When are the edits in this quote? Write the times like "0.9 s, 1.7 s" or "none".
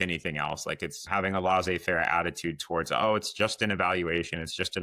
1.1 s